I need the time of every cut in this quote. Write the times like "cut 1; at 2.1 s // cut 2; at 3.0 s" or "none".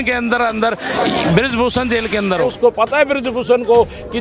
cut 1; at 2.5 s

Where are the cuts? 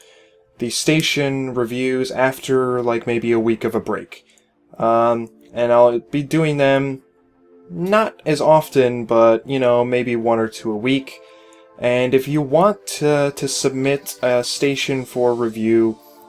none

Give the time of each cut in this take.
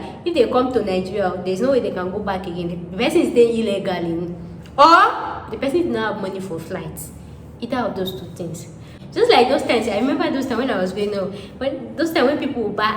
cut 1; at 8.9 s

